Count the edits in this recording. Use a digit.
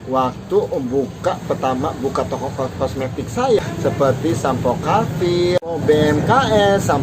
2